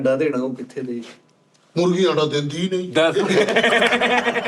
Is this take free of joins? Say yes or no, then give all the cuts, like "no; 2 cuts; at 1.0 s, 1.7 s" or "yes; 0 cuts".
yes; 0 cuts